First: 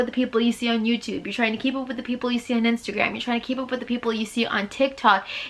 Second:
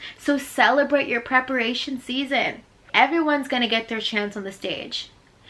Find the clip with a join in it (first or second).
second